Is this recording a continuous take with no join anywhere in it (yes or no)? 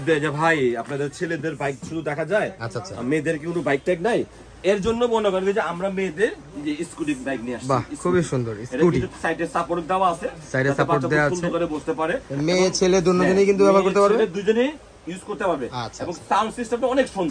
yes